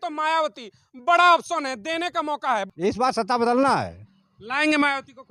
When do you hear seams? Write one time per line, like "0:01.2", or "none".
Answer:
0:02.7